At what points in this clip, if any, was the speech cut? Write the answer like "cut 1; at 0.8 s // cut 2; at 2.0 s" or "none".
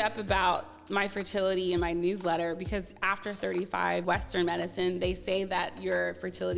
cut 1; at 4.0 s